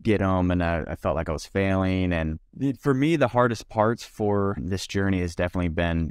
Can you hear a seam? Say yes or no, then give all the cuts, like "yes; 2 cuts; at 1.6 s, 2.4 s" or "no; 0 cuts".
yes; 2 cuts; at 2.4 s, 4.6 s